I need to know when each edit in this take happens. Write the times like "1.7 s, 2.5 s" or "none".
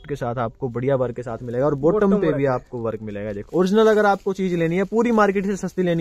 3.4 s